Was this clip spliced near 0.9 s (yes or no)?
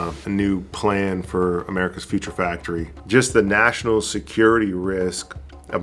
no